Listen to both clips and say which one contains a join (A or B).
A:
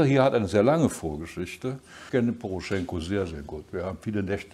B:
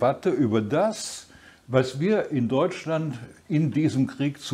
A